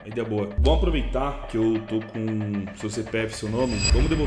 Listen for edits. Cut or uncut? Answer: uncut